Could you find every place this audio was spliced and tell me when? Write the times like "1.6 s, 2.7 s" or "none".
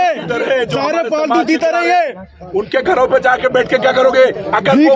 none